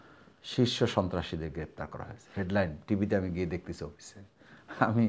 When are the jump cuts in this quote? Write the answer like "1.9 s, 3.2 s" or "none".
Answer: none